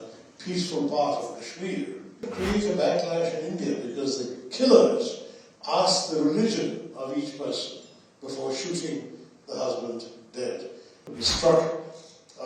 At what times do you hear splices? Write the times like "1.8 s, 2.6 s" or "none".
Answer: 2.3 s, 11.1 s